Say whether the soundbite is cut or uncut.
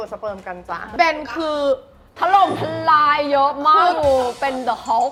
uncut